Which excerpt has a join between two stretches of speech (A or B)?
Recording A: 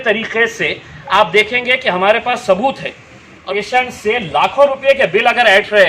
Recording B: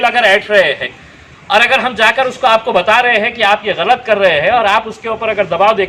A